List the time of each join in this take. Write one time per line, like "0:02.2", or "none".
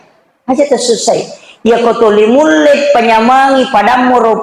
none

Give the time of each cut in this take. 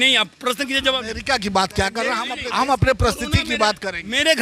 0:02.3

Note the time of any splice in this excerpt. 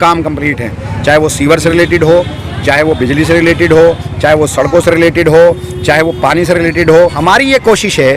0:07.0

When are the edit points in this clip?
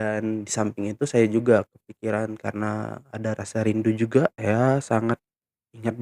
0:04.4

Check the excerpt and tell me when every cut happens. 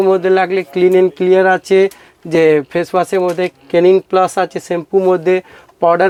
none

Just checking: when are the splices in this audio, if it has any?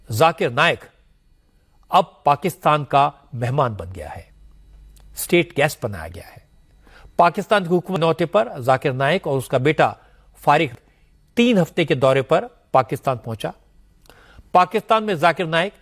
none

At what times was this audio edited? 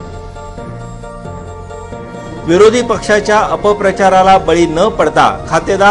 none

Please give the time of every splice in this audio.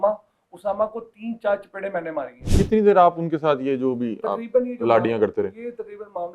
0:02.4

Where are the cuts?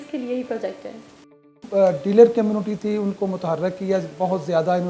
0:01.7

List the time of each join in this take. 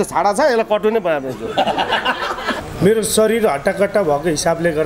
0:02.6

